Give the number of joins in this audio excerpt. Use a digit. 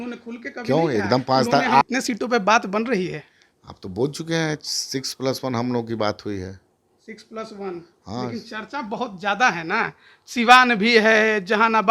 1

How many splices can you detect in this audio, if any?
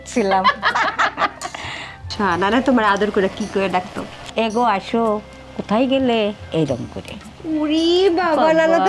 0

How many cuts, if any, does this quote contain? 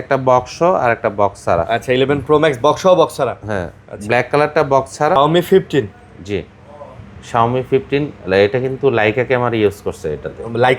1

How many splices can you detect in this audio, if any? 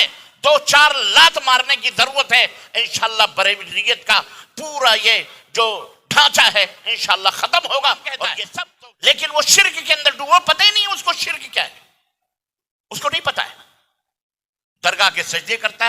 1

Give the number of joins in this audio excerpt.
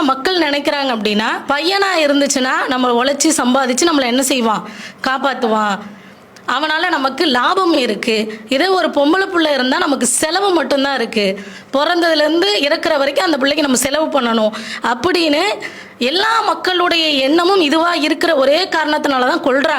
1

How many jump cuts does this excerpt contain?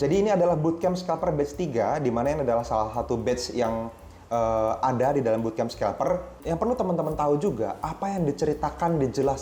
1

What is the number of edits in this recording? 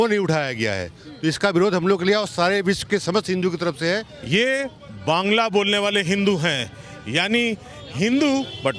1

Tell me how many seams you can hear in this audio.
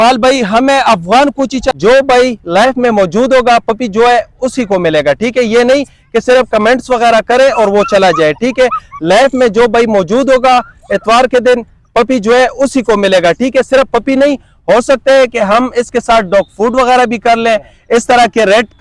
1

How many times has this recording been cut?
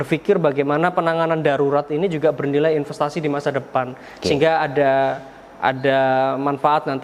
0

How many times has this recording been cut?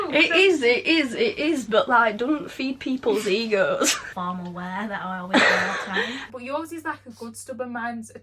2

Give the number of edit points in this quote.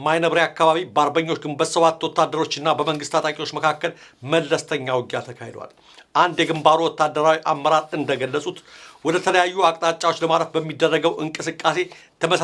1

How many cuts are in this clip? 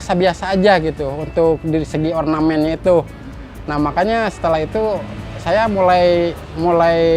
0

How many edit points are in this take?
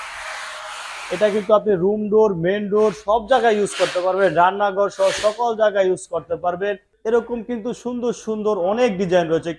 1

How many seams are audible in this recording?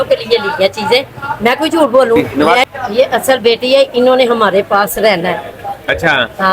1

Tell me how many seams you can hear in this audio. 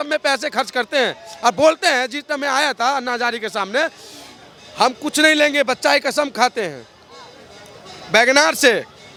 0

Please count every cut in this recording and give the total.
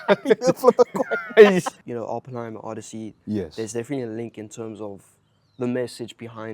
1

